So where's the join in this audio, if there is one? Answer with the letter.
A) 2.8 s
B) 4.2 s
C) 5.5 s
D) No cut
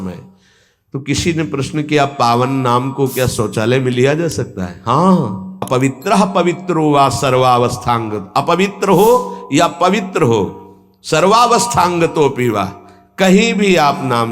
C